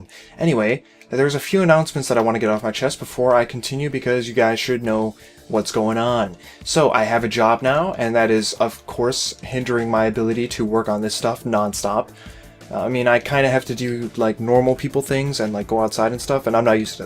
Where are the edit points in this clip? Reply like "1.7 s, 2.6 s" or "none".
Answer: 6.0 s